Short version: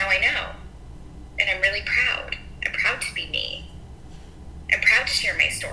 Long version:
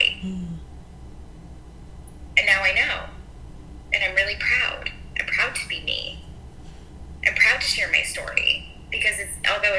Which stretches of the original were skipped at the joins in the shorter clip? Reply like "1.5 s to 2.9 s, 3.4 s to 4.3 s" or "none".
none